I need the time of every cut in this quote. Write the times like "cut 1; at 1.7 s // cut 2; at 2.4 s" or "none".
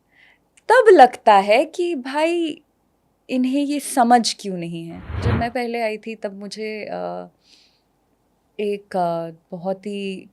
cut 1; at 5.2 s